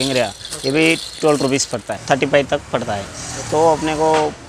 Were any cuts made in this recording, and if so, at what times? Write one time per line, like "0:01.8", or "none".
0:01.9